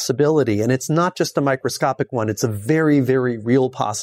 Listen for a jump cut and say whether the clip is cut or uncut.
uncut